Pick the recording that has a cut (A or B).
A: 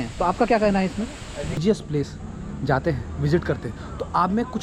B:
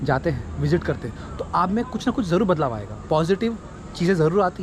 A